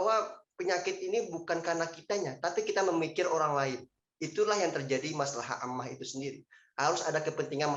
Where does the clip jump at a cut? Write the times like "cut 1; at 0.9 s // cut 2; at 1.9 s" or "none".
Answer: none

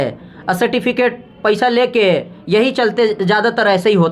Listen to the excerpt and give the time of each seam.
none

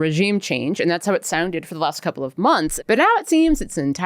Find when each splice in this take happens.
cut 1; at 2.7 s

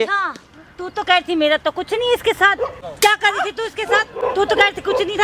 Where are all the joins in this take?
cut 1; at 2.8 s // cut 2; at 4.1 s

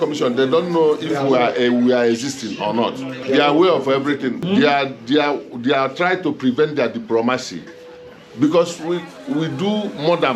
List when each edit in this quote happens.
cut 1; at 3.1 s // cut 2; at 4.4 s

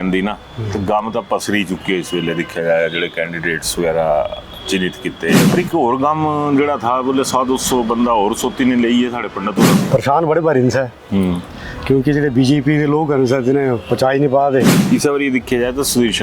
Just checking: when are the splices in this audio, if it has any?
cut 1; at 5.5 s // cut 2; at 9.8 s // cut 3; at 14.8 s

